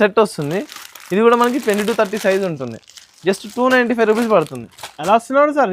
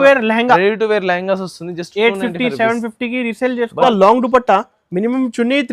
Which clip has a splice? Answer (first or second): second